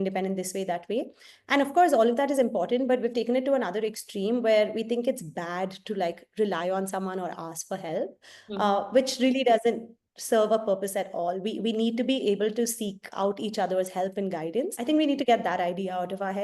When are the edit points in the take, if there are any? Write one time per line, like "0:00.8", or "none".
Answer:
0:14.8